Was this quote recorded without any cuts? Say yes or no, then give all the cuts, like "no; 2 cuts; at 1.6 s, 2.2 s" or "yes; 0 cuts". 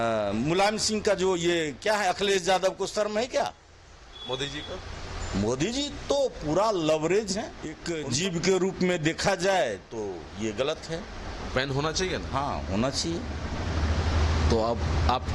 no; 1 cut; at 7.9 s